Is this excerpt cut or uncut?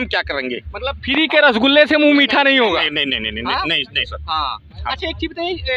uncut